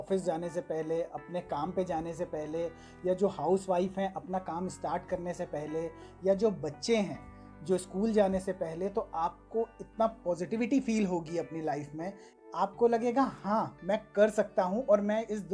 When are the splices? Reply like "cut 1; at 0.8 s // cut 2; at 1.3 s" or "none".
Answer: none